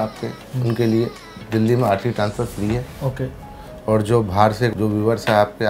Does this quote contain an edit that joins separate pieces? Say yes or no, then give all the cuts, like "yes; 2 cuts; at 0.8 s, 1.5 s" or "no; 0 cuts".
yes; 1 cut; at 4.7 s